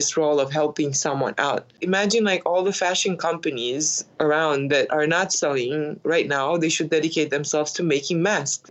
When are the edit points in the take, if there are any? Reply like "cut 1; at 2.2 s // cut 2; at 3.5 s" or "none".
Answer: cut 1; at 1.8 s